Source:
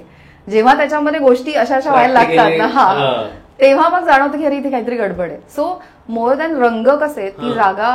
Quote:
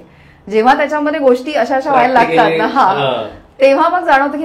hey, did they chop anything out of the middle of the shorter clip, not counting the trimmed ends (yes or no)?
no